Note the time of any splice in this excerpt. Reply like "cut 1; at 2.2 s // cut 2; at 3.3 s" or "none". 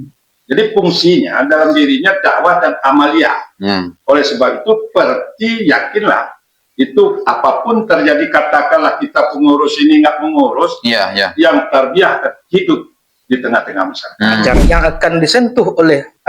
cut 1; at 14.6 s